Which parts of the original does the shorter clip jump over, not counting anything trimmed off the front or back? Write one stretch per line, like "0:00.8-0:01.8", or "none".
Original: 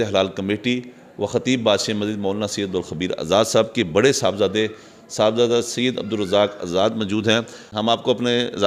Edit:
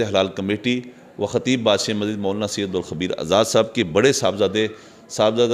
none